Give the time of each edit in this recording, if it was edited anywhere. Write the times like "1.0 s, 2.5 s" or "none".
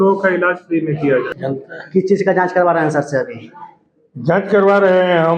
1.3 s